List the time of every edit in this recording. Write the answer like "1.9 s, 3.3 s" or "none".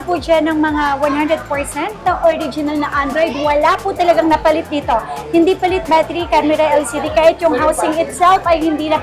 none